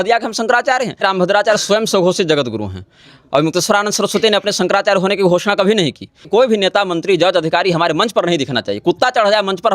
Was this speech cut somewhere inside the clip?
yes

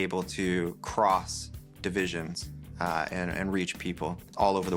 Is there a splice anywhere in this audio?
no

